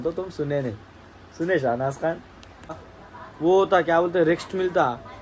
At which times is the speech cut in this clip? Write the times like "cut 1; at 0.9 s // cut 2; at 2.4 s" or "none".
cut 1; at 2.7 s